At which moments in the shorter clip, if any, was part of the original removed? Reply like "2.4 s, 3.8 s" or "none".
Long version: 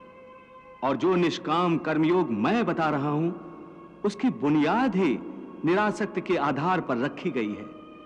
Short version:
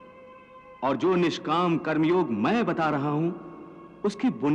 none